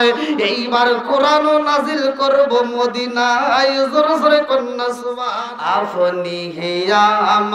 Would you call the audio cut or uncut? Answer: cut